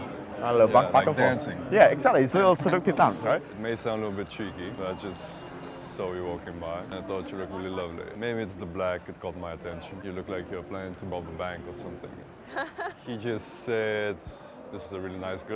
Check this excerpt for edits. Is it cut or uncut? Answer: cut